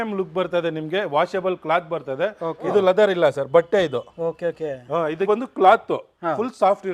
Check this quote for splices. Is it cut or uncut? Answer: cut